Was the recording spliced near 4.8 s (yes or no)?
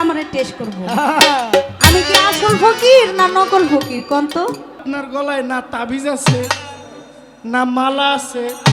yes